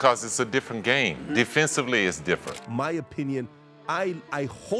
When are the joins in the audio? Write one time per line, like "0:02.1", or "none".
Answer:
0:02.6